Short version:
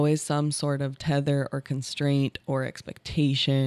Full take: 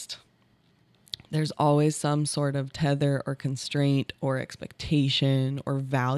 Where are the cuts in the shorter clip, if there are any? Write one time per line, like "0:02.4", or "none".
none